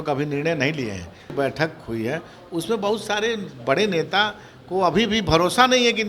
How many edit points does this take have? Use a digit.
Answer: 1